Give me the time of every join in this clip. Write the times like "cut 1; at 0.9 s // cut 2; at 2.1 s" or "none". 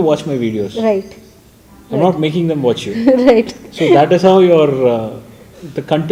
none